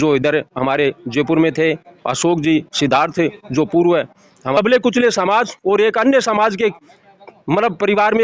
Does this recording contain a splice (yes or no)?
yes